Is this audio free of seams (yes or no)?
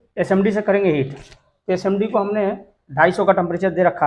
yes